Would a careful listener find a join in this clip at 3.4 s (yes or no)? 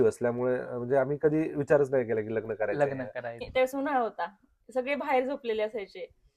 yes